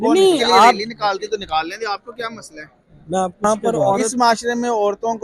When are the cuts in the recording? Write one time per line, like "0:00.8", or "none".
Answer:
0:00.8
0:03.4